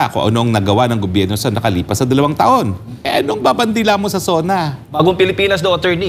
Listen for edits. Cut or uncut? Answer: cut